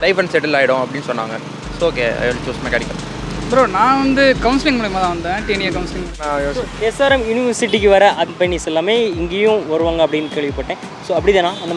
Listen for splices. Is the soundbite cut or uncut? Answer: cut